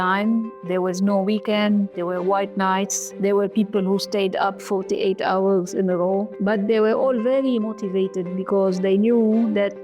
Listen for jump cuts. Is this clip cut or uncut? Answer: cut